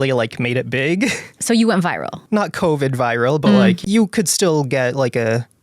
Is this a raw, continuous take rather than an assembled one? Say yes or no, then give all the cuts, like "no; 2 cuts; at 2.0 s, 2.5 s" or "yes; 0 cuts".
no; 3 cuts; at 1.3 s, 2.1 s, 3.8 s